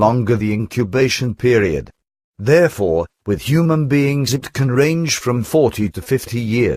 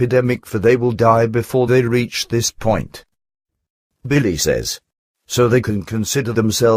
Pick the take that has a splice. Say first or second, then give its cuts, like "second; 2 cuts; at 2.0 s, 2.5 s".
first; 1 cut; at 2.8 s